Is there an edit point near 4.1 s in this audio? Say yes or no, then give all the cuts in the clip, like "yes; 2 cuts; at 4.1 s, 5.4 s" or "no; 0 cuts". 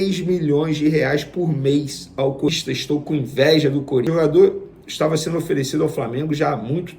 yes; 2 cuts; at 2.5 s, 4.1 s